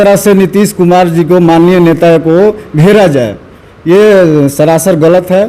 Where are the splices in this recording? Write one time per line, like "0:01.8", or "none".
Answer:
none